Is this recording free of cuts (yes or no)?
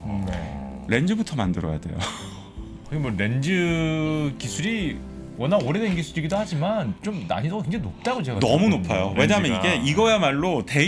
no